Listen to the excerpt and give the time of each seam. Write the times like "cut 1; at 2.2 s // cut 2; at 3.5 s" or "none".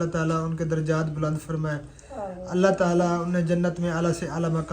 none